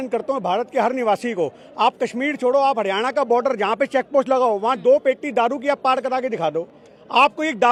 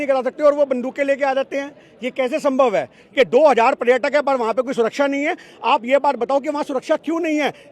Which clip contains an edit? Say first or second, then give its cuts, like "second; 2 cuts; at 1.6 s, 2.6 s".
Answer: second; 1 cut; at 3.0 s